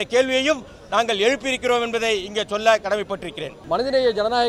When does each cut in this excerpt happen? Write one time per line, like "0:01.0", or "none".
none